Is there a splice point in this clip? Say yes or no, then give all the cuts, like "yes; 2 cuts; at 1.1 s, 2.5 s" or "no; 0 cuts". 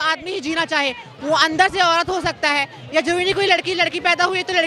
no; 0 cuts